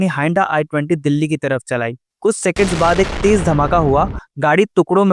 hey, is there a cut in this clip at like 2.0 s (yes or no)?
yes